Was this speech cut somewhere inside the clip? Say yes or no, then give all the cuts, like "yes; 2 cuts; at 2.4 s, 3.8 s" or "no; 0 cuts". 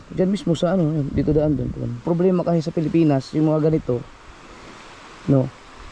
yes; 1 cut; at 2.0 s